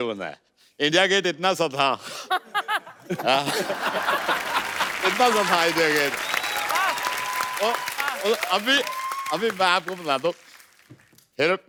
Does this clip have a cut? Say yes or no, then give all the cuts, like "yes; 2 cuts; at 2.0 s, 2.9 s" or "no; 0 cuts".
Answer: no; 0 cuts